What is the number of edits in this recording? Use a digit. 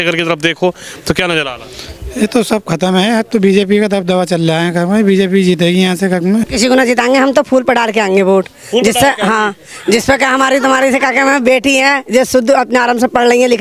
1